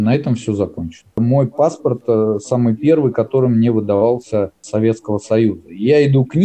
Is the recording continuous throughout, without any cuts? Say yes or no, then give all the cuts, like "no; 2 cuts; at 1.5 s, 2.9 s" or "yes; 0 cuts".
no; 1 cut; at 1.2 s